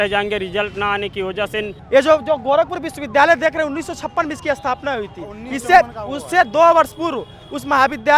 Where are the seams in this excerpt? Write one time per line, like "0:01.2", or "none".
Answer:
0:01.7

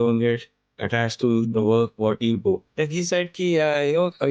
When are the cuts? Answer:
0:02.7

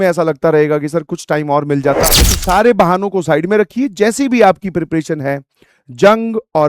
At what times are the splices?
0:02.0

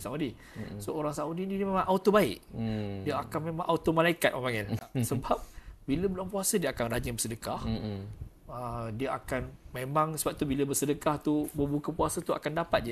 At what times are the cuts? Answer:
none

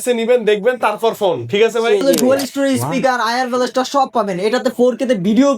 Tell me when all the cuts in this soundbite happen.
0:02.0

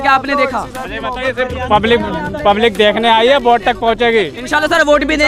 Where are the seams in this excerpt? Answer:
none

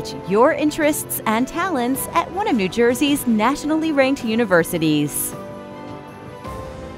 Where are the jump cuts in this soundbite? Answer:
0:05.1

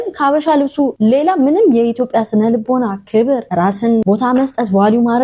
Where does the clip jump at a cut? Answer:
0:00.9
0:03.7

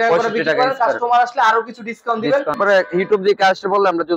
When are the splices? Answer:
0:02.6

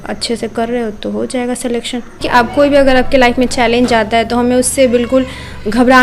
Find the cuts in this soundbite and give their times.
0:02.2

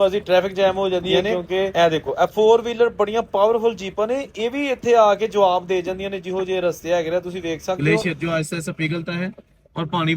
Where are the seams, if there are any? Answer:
0:01.7
0:07.9

